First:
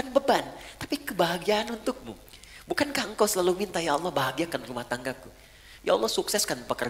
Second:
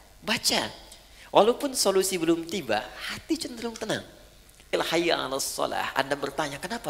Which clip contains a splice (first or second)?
second